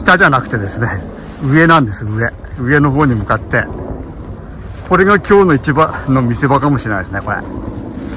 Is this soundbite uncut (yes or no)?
yes